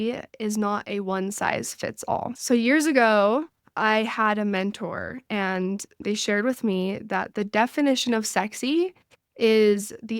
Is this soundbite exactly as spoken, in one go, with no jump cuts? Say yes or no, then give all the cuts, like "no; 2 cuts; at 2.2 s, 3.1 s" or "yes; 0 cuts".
no; 2 cuts; at 2.4 s, 6.0 s